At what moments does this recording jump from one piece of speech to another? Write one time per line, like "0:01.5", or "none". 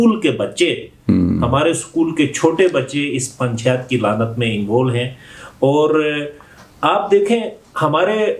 none